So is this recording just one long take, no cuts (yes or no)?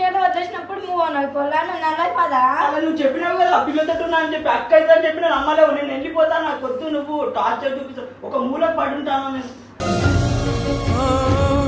yes